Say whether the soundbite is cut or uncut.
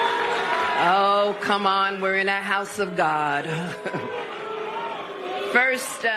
uncut